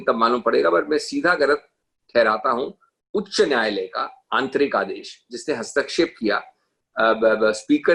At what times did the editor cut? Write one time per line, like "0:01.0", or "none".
none